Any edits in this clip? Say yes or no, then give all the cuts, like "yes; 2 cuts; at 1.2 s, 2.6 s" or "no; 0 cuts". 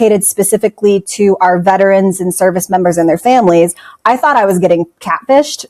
no; 0 cuts